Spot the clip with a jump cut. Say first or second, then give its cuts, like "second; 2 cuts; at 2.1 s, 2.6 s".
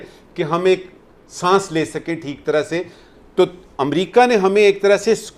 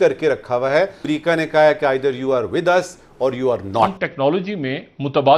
second; 2 cuts; at 1.0 s, 4.0 s